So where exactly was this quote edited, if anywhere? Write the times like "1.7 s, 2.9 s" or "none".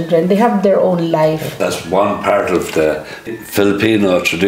1.6 s, 3.3 s